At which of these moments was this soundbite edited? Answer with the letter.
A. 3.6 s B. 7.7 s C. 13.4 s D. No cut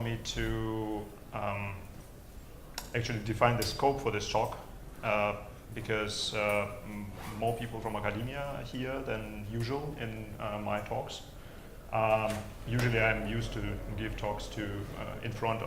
D